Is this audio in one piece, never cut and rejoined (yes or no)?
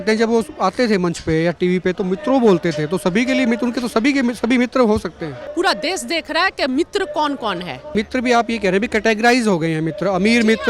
no